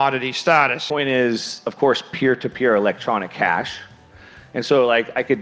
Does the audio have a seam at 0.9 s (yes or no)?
yes